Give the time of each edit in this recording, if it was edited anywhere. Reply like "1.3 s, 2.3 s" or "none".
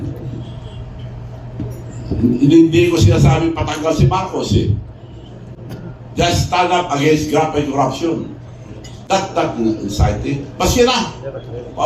none